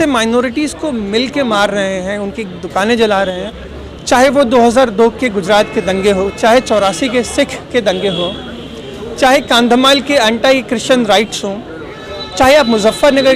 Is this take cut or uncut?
cut